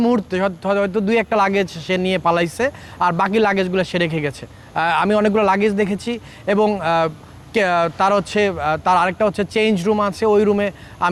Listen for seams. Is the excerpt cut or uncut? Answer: uncut